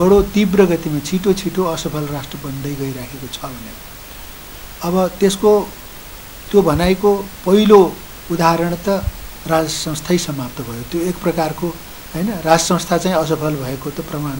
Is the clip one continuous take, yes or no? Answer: yes